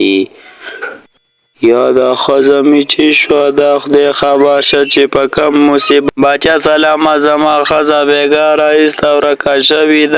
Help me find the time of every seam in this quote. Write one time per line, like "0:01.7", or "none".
0:06.1